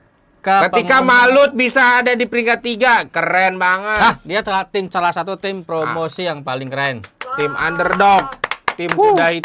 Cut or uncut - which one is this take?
uncut